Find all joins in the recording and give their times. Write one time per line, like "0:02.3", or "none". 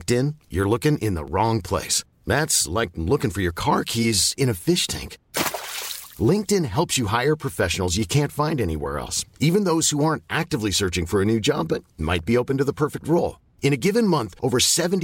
none